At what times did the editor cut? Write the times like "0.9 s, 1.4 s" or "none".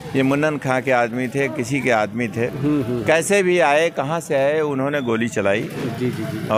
none